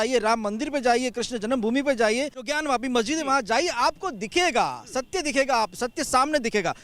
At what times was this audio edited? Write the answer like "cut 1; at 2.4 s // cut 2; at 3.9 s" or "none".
cut 1; at 2.5 s